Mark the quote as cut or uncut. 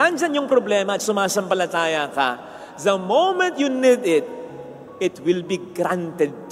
uncut